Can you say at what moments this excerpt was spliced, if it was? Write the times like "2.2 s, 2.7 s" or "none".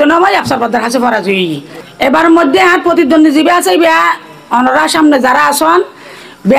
1.8 s